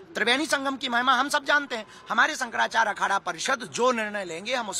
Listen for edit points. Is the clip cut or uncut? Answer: uncut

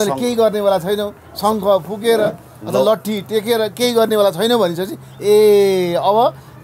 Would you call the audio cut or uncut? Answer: uncut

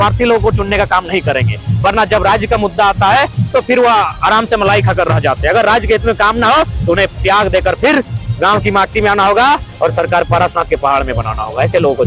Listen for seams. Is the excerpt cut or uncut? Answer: uncut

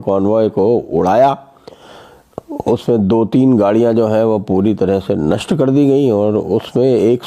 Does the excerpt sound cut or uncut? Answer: uncut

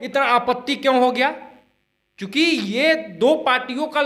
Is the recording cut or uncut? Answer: uncut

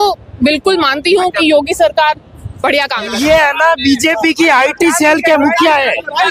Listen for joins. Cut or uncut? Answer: cut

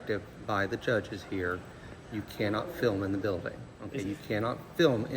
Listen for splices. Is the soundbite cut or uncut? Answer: cut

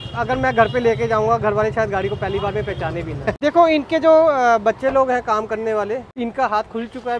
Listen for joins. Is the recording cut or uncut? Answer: cut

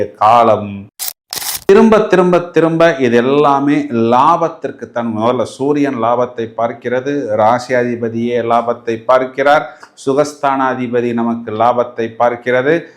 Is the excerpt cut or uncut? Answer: cut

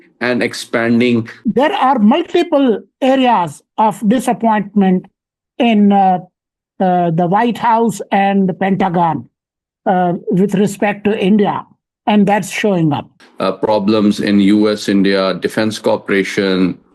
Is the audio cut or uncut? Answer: cut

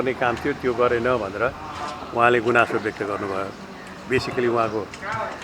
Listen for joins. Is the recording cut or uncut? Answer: uncut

